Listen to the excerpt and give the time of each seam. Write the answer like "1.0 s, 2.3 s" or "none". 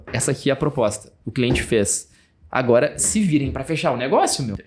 none